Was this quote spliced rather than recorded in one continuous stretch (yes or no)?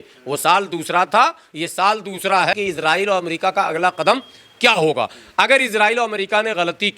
yes